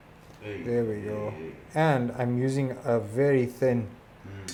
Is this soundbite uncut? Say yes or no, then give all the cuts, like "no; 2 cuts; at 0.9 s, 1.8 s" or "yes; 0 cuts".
yes; 0 cuts